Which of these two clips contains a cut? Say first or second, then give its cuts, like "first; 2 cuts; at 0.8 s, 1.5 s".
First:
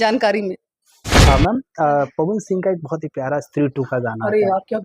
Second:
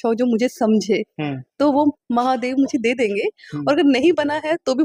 first; 1 cut; at 1.2 s